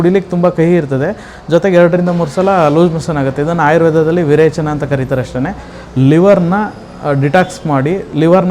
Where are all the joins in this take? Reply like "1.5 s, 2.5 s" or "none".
none

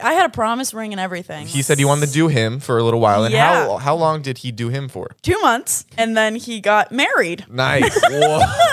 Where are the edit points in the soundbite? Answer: 1.5 s, 5.1 s, 5.9 s

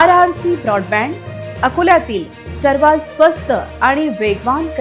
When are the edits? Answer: none

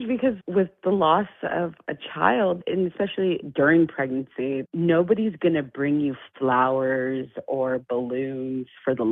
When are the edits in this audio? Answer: 3.4 s

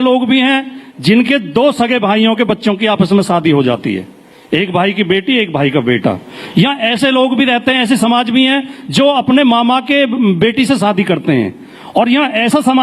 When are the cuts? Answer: none

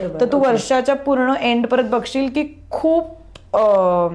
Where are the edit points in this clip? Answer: none

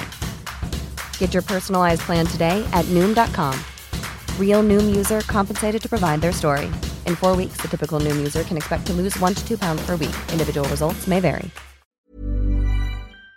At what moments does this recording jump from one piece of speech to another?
12.1 s

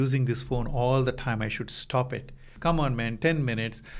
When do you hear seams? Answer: 2.5 s

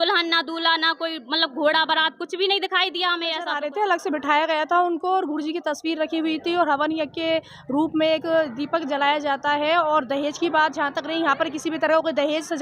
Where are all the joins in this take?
3.4 s

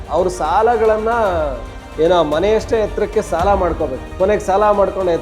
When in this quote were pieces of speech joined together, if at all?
4.0 s

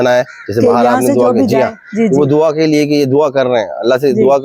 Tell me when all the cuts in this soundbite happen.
none

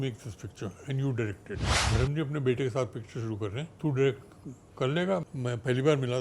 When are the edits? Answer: 1.8 s, 3.7 s, 5.2 s

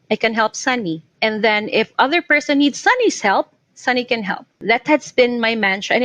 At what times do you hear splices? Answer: 1.1 s, 4.6 s

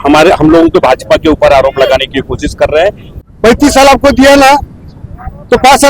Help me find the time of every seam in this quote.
3.1 s

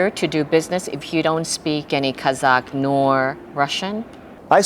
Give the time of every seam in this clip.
1.9 s

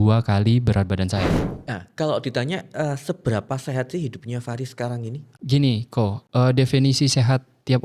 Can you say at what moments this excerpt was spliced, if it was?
1.5 s, 5.2 s

